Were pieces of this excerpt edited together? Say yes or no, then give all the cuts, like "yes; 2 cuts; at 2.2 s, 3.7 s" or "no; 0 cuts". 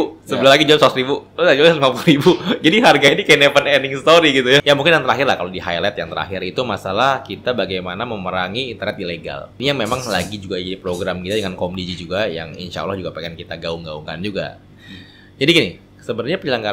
yes; 2 cuts; at 4.6 s, 9.5 s